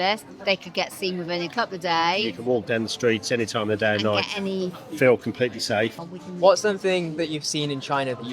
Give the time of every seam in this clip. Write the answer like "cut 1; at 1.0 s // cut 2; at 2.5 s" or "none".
cut 1; at 6.0 s